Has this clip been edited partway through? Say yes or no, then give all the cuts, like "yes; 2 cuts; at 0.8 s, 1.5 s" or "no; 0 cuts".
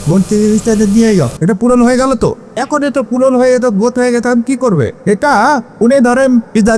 yes; 4 cuts; at 1.3 s, 2.5 s, 5.0 s, 5.7 s